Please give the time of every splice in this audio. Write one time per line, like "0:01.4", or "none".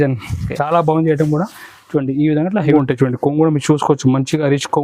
0:02.7